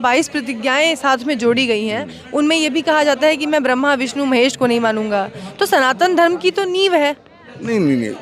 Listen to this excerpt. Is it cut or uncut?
uncut